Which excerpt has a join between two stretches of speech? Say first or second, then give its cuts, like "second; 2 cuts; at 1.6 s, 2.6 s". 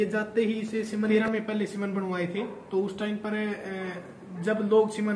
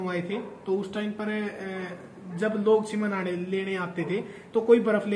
first; 1 cut; at 1.1 s